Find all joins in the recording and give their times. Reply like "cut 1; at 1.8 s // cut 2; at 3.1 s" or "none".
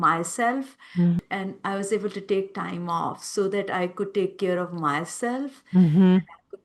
cut 1; at 1.2 s

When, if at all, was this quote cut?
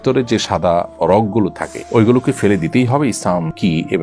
none

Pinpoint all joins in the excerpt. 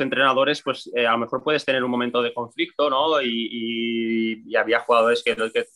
none

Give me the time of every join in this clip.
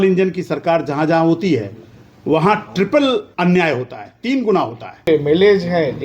cut 1; at 3.3 s // cut 2; at 5.1 s

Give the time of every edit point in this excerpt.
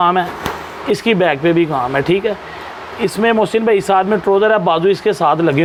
none

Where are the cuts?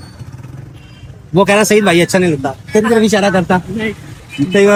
none

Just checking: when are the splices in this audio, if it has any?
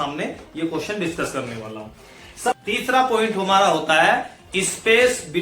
cut 1; at 2.5 s

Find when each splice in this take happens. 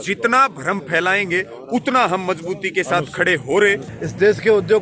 cut 1; at 3.9 s

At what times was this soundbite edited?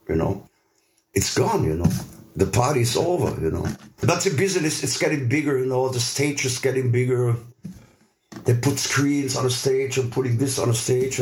cut 1; at 4.0 s

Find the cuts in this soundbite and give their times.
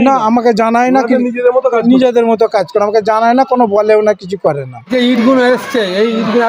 cut 1; at 4.9 s

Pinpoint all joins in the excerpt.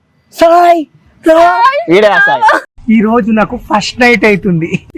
none

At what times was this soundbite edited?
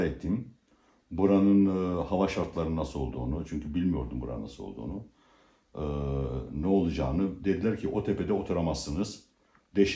none

